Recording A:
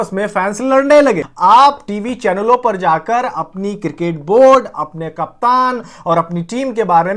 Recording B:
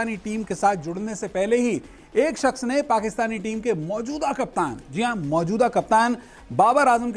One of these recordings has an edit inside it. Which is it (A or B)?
A